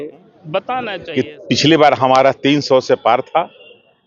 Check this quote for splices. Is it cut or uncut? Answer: cut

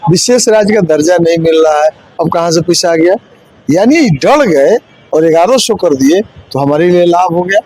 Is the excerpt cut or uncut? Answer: uncut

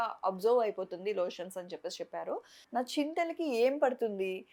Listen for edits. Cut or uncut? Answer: cut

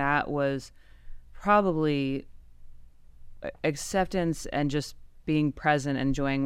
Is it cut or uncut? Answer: uncut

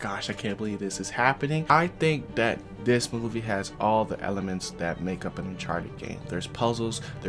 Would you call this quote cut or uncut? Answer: cut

